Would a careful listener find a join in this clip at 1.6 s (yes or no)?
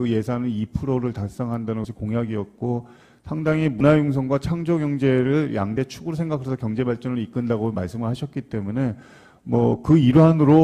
no